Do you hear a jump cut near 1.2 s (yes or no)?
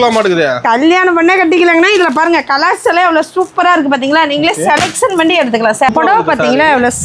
no